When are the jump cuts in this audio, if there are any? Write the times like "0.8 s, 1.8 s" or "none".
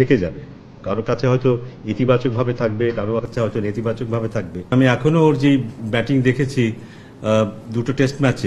4.7 s